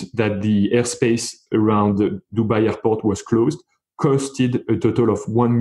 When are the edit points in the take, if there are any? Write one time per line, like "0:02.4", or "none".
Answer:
none